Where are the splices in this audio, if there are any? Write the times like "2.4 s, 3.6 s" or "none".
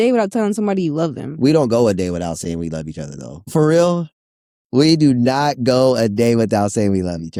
none